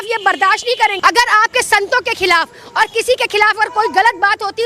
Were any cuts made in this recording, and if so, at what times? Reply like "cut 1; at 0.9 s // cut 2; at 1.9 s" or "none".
cut 1; at 1.0 s